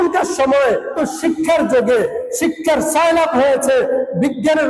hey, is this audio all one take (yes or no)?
no